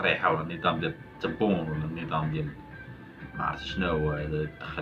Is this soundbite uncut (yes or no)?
yes